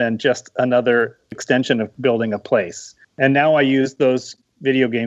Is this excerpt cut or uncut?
cut